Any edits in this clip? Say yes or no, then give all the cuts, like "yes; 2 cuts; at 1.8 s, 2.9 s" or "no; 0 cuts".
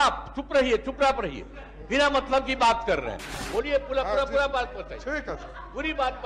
yes; 1 cut; at 3.4 s